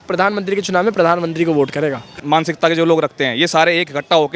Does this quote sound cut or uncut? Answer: cut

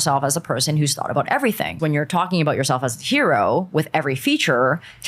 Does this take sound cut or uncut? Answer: cut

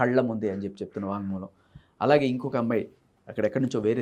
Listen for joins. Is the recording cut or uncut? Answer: uncut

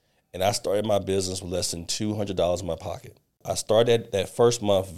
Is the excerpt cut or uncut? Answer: cut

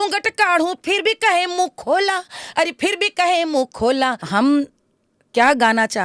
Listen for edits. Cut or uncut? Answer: cut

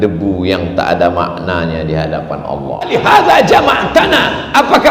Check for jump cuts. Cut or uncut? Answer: cut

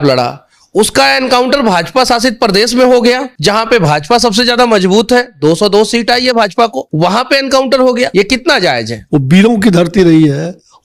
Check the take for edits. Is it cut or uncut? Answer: cut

